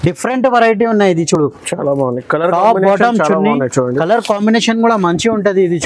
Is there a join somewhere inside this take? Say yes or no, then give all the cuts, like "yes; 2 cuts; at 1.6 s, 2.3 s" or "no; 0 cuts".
no; 0 cuts